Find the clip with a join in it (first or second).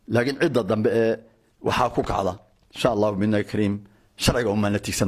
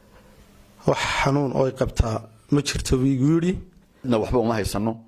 second